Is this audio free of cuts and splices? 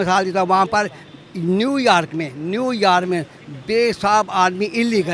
yes; 0 cuts

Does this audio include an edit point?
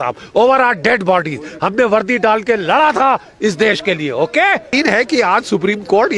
yes; 1 cut; at 4.7 s

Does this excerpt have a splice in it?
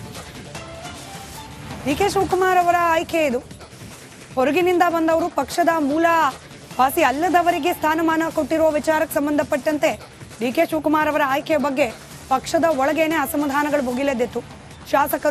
yes; 1 cut; at 1.2 s

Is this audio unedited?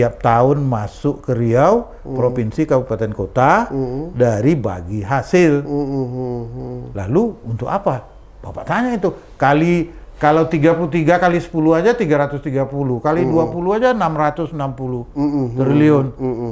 yes; 0 cuts

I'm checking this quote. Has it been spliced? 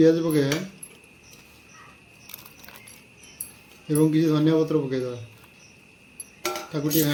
no; 0 cuts

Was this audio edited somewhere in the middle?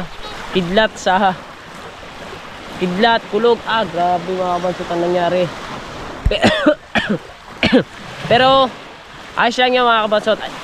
no; 0 cuts

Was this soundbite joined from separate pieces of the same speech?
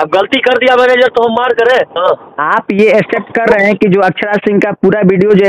yes; 1 cut; at 1.9 s

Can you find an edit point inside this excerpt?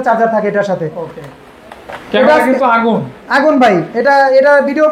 no; 0 cuts

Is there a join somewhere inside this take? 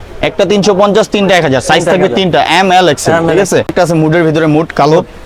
no; 0 cuts

